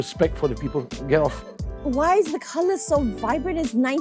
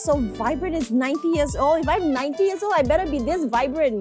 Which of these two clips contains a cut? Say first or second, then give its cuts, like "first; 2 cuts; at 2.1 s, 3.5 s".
first; 1 cut; at 1.7 s